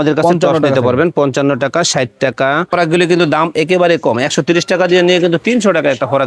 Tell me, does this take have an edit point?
yes; 1 cut; at 2.7 s

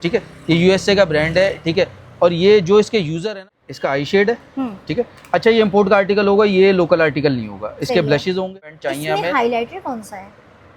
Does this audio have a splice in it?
yes; 2 cuts; at 3.5 s, 8.8 s

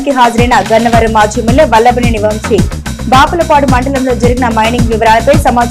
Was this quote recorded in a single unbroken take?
yes; 0 cuts

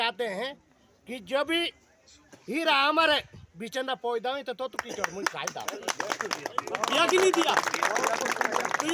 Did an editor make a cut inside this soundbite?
yes; 1 cut; at 6.4 s

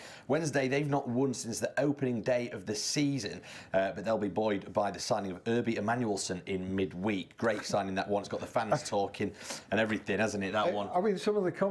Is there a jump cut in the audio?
yes; 1 cut; at 2.0 s

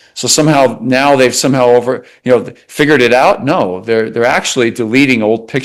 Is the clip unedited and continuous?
yes; 0 cuts

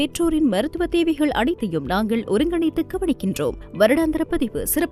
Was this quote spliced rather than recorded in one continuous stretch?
no; 0 cuts

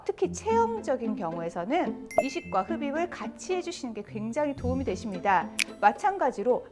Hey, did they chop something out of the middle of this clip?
yes; 1 cut; at 5.6 s

